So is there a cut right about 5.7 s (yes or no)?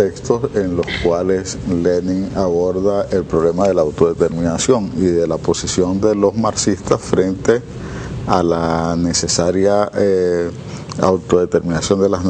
yes